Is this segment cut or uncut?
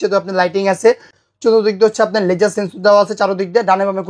cut